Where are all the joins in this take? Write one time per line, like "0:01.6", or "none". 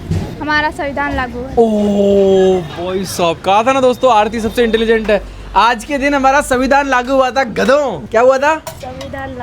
none